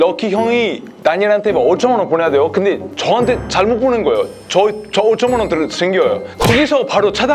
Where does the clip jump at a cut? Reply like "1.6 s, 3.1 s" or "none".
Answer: 6.3 s

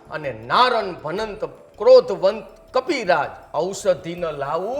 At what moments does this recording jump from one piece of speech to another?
3.4 s

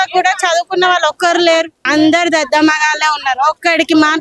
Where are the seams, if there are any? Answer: 1.8 s

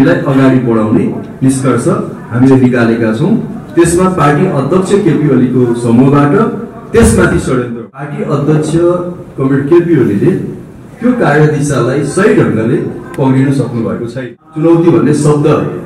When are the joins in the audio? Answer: 7.7 s, 14.1 s

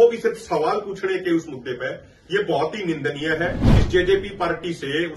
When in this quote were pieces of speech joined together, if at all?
3.7 s

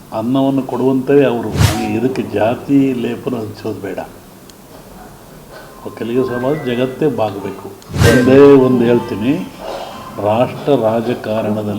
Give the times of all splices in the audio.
1.6 s, 8.0 s

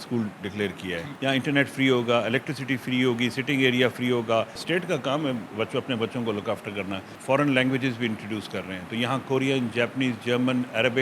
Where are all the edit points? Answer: 1.1 s, 4.6 s, 7.1 s

